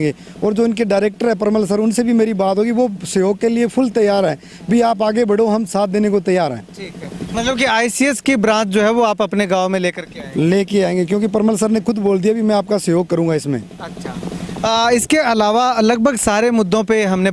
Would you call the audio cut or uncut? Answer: uncut